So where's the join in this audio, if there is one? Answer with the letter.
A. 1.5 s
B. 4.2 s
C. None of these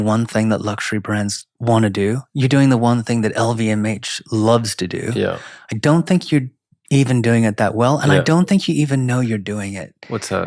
A